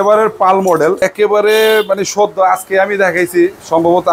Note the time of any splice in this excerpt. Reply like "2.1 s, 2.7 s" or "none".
1.0 s